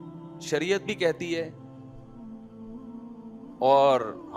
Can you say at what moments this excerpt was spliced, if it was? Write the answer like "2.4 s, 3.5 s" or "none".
1.5 s, 3.3 s